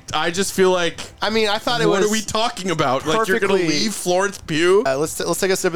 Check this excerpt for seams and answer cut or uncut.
cut